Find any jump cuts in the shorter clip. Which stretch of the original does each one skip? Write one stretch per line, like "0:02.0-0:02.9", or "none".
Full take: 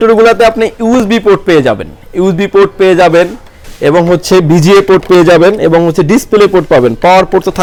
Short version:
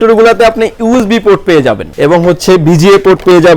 0:01.9-0:03.7